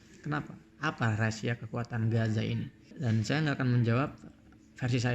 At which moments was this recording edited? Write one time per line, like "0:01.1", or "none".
0:02.8